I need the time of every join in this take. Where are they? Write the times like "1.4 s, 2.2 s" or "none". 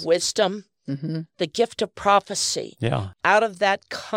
3.1 s